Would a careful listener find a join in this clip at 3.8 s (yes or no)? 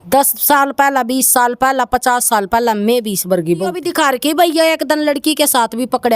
yes